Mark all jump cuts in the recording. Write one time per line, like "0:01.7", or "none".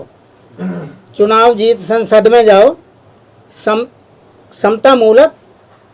none